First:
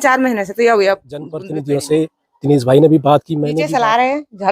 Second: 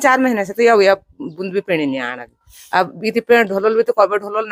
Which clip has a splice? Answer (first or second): first